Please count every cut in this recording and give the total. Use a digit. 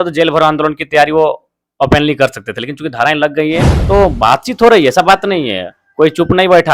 1